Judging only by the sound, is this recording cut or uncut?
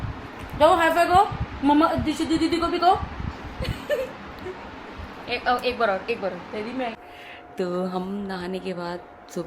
cut